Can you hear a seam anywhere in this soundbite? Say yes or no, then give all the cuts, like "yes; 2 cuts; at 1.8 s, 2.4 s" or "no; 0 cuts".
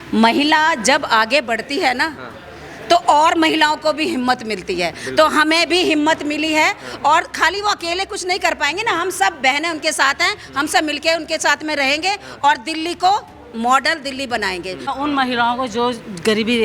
yes; 1 cut; at 14.9 s